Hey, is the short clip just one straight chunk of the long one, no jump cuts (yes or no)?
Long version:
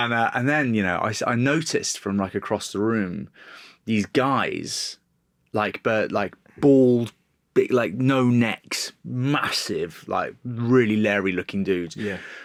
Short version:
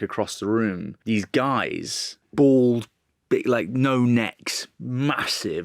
no